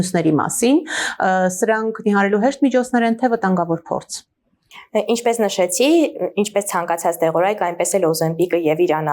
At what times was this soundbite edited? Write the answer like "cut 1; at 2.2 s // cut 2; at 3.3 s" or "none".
none